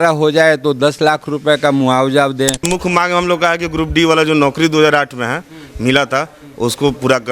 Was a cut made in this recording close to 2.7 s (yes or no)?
yes